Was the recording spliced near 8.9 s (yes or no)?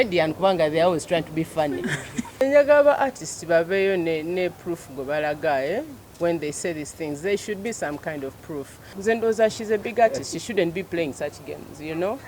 yes